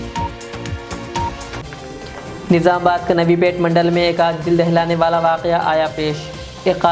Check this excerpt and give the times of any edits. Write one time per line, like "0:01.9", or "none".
none